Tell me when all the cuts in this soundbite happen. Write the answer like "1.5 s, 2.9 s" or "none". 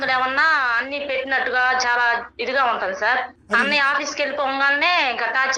3.7 s